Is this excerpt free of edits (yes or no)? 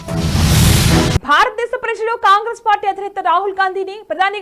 no